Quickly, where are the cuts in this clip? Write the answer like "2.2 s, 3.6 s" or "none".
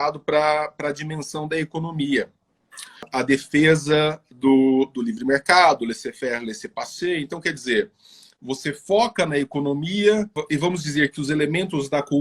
3.1 s, 10.4 s

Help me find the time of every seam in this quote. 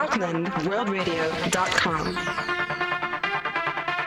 1.6 s

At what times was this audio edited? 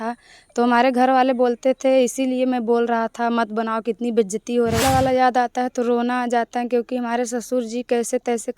4.8 s

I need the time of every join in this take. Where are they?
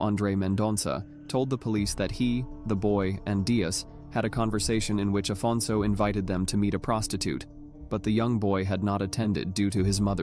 9.0 s

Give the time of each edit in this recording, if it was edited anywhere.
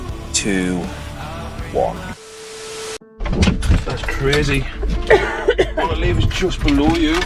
none

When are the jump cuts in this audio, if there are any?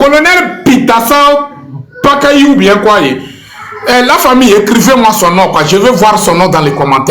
5.2 s

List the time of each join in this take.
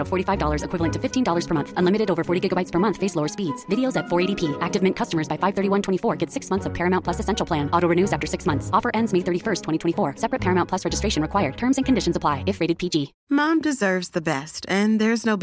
13.2 s

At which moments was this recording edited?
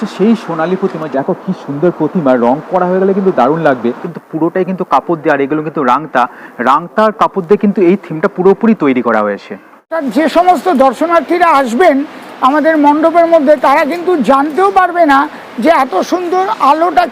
1.1 s, 4.0 s, 9.9 s

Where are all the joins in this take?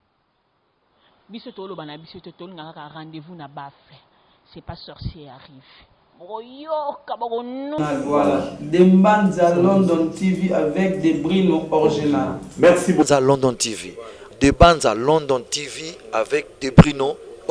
7.8 s

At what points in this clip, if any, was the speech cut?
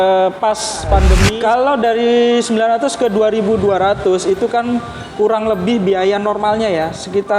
1.2 s

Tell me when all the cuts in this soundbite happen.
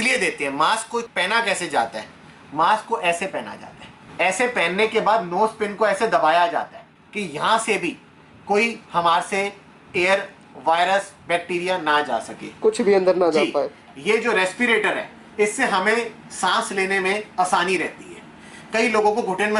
none

